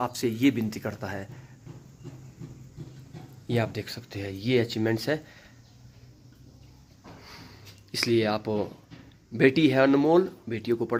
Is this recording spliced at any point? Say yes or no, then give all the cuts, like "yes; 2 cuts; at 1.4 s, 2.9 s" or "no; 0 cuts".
no; 0 cuts